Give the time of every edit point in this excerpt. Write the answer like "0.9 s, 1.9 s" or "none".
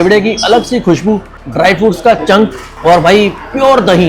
1.4 s, 2.7 s